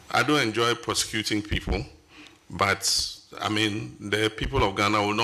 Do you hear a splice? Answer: no; 0 cuts

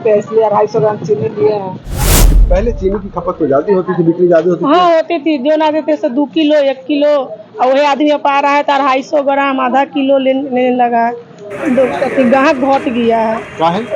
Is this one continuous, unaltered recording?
no; 1 cut; at 2.3 s

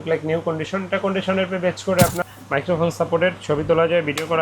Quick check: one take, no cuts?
no; 1 cut; at 2.2 s

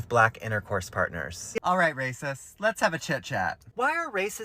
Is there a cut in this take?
yes; 1 cut; at 1.6 s

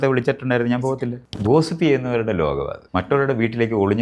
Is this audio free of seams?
no; 2 cuts; at 1.2 s, 2.8 s

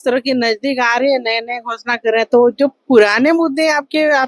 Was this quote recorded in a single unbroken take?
yes; 0 cuts

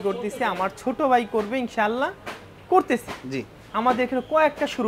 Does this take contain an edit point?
no; 0 cuts

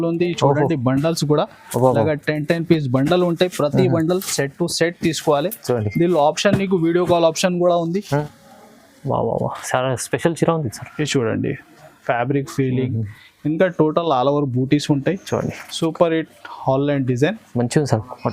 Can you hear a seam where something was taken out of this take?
yes; 1 cut; at 8.2 s

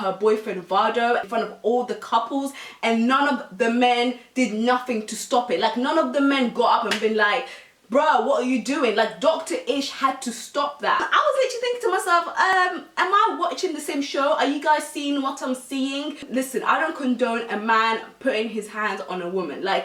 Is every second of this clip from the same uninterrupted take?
yes; 0 cuts

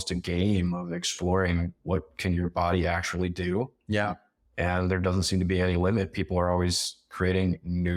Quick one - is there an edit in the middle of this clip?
no; 0 cuts

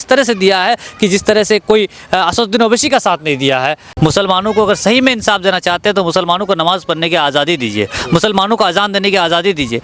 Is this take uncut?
no; 1 cut; at 3.8 s

